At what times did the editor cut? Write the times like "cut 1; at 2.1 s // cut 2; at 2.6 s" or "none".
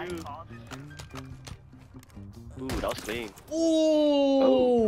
cut 1; at 3.4 s